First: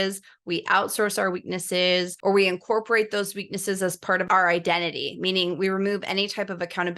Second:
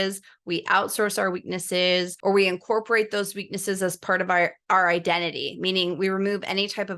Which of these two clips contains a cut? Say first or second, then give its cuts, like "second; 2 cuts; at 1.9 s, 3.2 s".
first; 1 cut; at 4.2 s